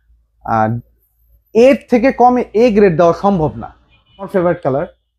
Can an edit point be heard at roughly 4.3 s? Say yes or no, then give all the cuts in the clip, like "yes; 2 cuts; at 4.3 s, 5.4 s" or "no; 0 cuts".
yes; 1 cut; at 4.3 s